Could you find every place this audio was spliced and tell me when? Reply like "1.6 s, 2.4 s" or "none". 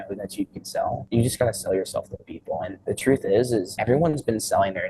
1.0 s, 2.7 s, 3.7 s